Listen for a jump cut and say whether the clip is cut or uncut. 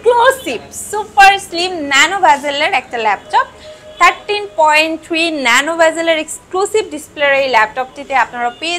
uncut